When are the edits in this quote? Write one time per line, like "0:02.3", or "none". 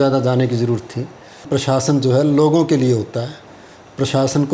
0:01.5